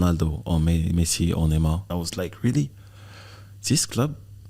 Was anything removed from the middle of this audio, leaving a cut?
yes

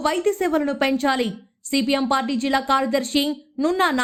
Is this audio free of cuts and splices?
yes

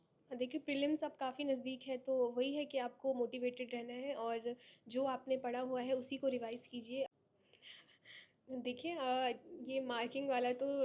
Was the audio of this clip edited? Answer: yes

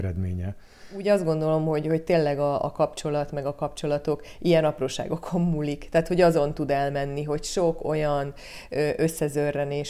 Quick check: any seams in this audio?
yes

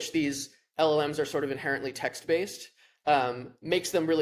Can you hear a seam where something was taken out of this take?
no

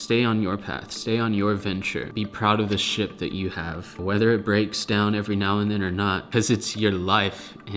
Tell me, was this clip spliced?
yes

